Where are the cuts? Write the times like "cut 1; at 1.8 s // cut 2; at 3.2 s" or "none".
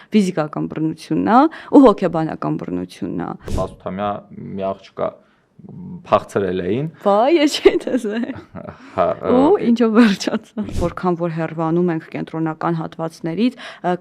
cut 1; at 3.5 s // cut 2; at 10.6 s